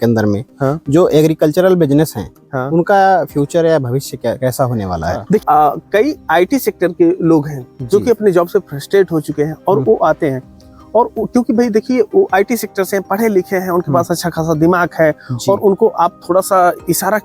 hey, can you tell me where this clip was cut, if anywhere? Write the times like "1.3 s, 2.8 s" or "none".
5.4 s